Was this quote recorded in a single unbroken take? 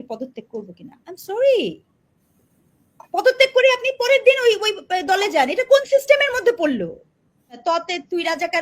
no; 1 cut; at 7.6 s

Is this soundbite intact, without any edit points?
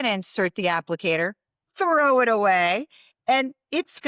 yes; 0 cuts

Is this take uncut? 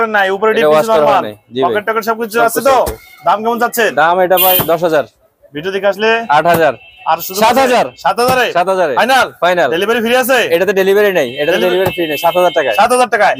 yes; 0 cuts

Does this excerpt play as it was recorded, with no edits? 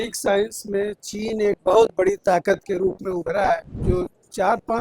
no; 1 cut; at 3.7 s

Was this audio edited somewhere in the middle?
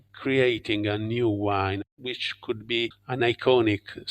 yes; 1 cut; at 1.8 s

